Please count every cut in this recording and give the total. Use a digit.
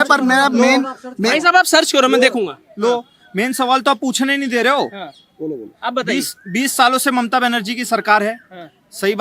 0